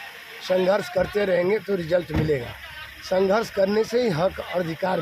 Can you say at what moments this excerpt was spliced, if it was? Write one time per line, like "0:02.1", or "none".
none